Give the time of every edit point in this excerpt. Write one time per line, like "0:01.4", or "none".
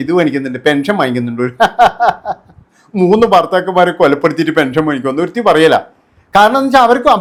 none